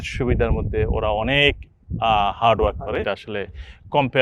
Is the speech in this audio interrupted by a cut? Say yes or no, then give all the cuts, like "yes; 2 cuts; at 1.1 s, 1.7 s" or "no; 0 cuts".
yes; 1 cut; at 3.0 s